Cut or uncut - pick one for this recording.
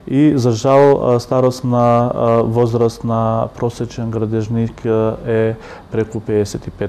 uncut